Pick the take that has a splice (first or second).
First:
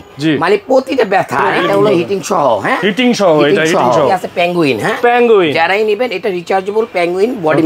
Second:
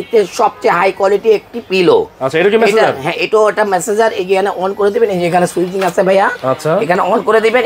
first